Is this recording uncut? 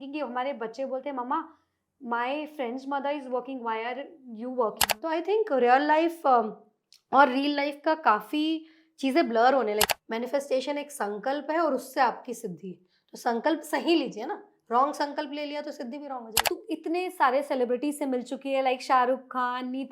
no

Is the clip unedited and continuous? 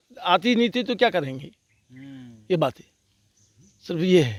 yes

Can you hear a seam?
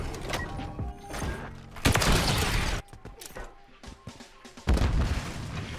yes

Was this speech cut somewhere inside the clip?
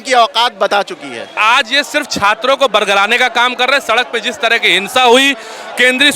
yes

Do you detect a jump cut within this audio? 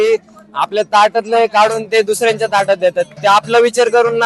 no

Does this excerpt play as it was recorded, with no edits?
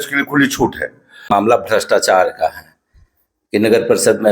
no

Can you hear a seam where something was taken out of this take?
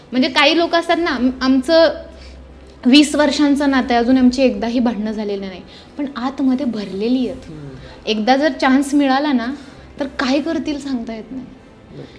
no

